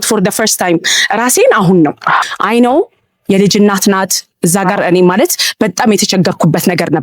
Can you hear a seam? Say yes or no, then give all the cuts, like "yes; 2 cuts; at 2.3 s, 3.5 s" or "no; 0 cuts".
yes; 1 cut; at 2.2 s